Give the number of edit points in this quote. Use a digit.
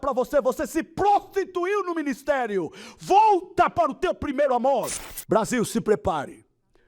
1